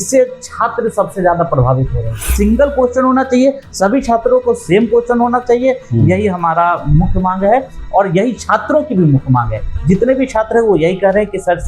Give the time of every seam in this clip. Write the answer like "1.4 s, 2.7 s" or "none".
2.3 s